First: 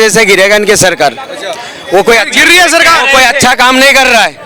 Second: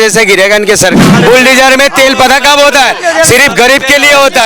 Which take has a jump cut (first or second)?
second